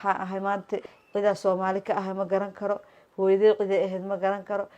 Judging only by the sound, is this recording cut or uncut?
cut